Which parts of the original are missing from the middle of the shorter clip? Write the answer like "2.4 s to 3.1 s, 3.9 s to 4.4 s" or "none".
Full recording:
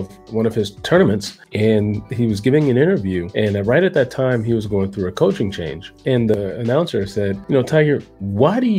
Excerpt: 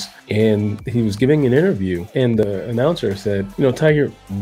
3.2 s to 5.9 s